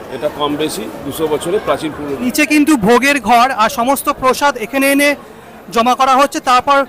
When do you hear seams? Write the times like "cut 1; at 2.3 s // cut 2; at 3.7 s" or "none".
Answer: cut 1; at 2.3 s